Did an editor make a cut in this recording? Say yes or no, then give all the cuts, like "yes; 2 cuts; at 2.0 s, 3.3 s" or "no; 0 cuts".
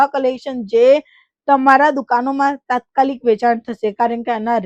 no; 0 cuts